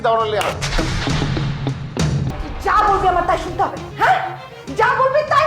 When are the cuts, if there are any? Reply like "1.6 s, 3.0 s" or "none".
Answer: 2.3 s